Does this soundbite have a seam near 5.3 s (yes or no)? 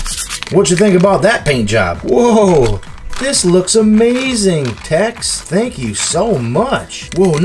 yes